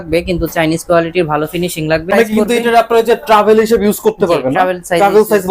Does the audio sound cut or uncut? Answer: cut